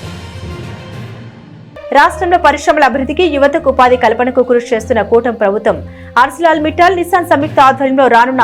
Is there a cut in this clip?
no; 0 cuts

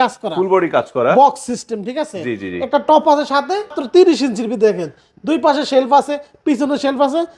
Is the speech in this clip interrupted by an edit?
yes; 1 cut; at 3.8 s

